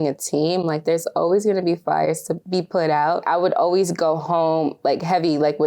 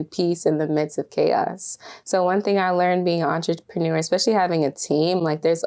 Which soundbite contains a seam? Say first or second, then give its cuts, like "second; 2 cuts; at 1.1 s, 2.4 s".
first; 2 cuts; at 2.3 s, 3.2 s